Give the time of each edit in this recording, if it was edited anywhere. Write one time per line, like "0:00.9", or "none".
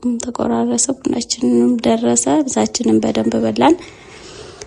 none